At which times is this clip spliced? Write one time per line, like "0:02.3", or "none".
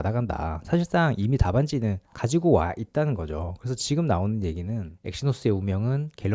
0:05.0